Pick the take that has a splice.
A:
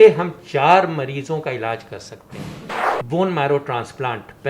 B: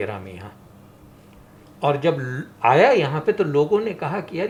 A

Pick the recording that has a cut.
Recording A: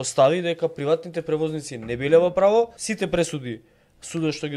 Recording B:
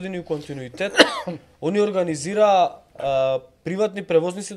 A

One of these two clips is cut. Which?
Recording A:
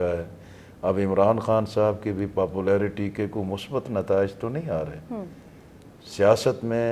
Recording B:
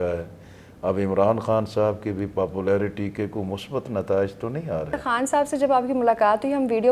B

